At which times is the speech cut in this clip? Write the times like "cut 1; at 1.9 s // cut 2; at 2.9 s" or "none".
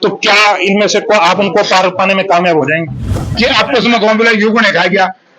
cut 1; at 3.3 s